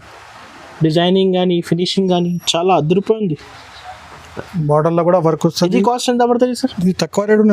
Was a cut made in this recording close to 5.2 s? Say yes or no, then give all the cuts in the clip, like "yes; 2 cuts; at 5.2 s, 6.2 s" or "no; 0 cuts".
no; 0 cuts